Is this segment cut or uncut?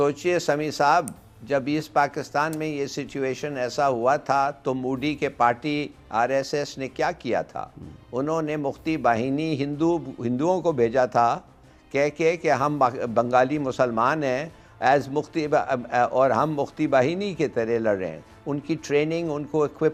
uncut